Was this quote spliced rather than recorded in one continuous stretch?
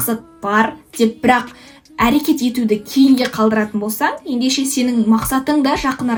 no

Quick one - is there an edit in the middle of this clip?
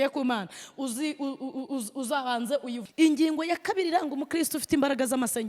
yes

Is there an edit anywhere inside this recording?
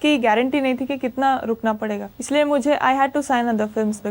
yes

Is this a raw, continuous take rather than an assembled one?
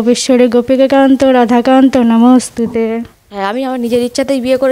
no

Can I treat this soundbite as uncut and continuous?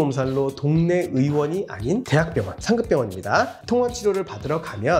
yes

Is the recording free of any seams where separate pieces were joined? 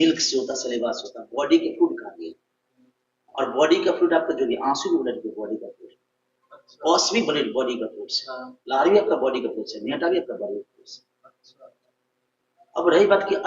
yes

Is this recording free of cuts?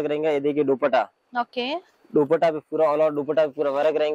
yes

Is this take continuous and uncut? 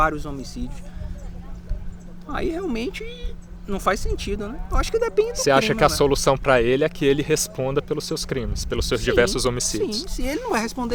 yes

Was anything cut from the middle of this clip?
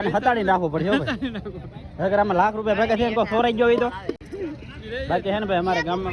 no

